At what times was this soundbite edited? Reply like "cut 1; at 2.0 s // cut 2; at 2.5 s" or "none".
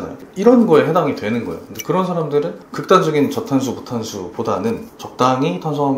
none

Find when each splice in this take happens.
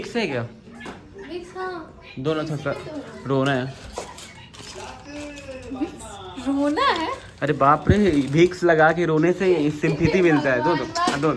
none

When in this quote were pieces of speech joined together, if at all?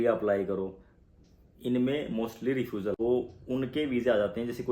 cut 1; at 3.0 s

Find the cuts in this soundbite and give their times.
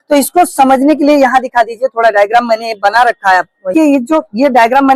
cut 1; at 3.7 s

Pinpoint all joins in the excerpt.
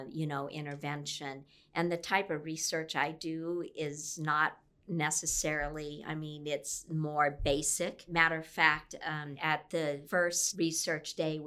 cut 1; at 8.1 s // cut 2; at 9.3 s // cut 3; at 10.4 s

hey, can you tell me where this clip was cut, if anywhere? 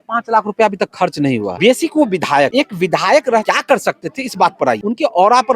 cut 1; at 1.5 s // cut 2; at 2.5 s // cut 3; at 3.4 s // cut 4; at 4.8 s

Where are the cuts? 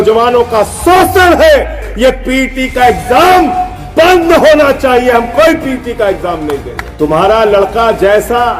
cut 1; at 1.8 s // cut 2; at 6.8 s

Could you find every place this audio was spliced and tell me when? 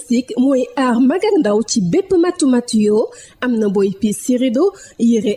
none

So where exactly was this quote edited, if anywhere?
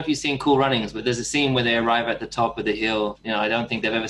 cut 1; at 1.0 s // cut 2; at 3.2 s

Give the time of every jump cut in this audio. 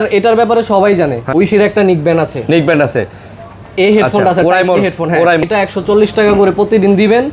cut 1; at 1.2 s // cut 2; at 5.4 s

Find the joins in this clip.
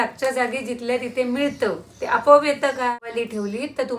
cut 1; at 3.1 s

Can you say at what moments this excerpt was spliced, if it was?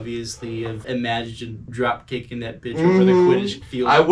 none

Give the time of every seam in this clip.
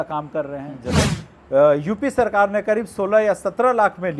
cut 1; at 0.9 s

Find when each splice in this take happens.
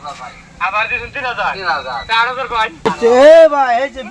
cut 1; at 2.9 s

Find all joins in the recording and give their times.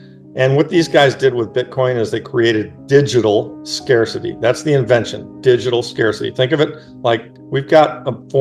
cut 1; at 7.3 s

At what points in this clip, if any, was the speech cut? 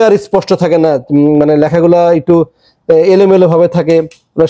none

